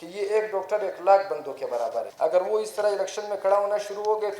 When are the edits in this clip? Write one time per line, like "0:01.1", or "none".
0:02.1